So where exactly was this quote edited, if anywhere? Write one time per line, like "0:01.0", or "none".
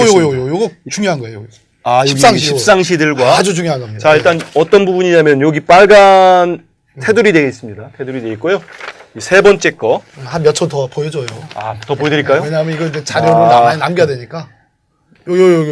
0:10.2